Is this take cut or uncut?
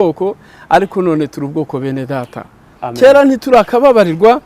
cut